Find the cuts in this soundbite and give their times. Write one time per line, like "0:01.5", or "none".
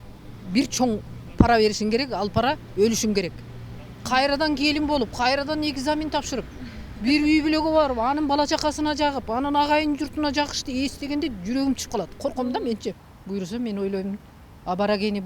0:03.9
0:13.1